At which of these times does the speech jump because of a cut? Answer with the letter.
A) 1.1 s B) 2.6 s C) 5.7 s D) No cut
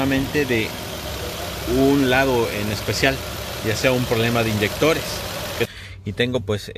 C